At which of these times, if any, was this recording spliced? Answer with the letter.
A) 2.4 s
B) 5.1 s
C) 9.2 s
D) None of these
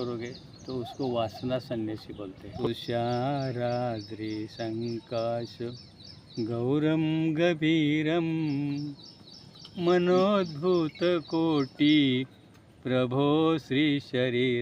A